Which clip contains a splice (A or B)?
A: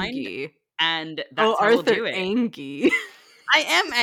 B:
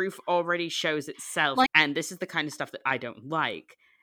B